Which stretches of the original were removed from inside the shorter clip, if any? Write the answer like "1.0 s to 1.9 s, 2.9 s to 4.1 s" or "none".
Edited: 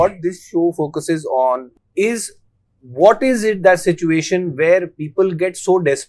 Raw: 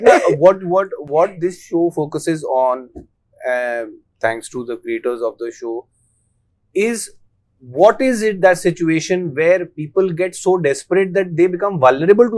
2.9 s to 6.5 s